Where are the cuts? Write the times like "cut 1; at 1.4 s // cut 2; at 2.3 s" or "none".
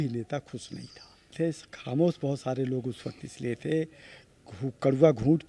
cut 1; at 1.3 s